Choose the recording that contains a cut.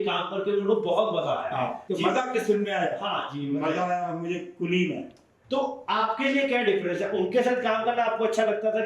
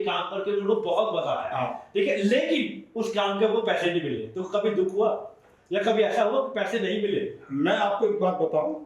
first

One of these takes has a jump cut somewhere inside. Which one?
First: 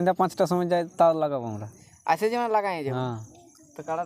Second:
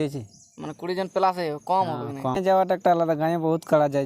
second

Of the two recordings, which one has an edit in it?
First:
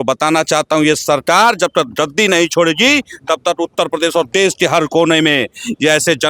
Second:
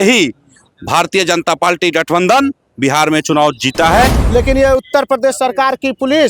second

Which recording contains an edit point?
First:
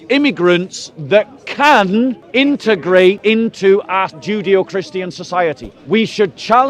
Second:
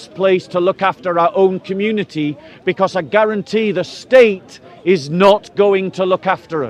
first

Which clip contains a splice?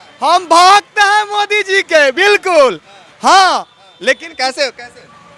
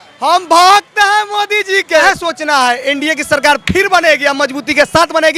second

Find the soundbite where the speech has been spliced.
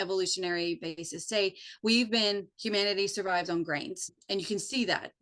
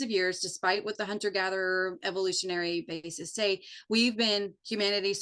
first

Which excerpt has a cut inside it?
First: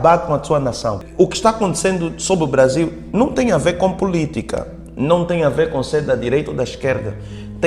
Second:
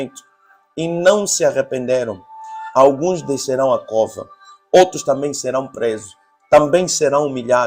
first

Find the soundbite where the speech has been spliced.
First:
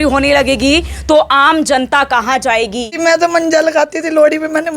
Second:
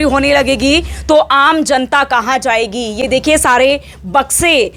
first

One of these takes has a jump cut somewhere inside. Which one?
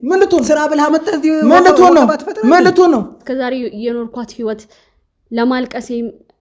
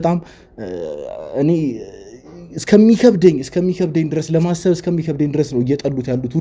first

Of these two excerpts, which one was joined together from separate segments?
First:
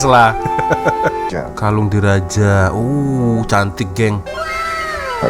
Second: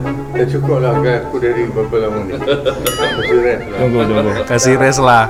first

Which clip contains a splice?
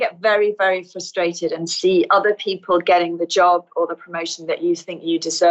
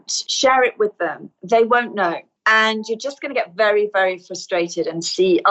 second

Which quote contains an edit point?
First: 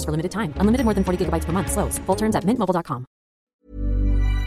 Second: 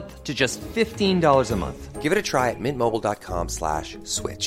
first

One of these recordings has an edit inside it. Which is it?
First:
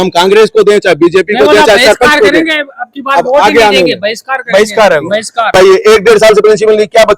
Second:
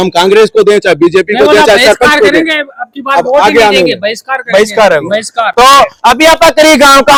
first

